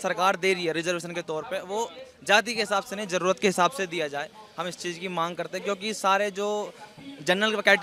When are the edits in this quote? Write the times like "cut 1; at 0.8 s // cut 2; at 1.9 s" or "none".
none